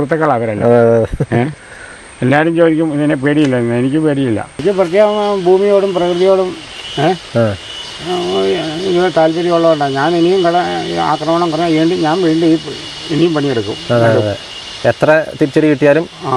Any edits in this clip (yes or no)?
yes